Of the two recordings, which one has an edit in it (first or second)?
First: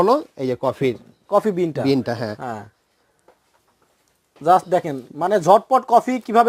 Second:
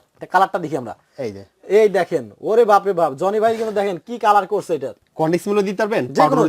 second